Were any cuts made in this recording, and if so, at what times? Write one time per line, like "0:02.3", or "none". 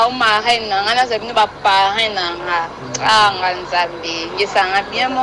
none